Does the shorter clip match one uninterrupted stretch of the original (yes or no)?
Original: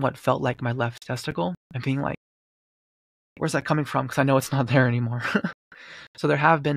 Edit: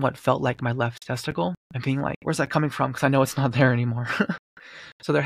no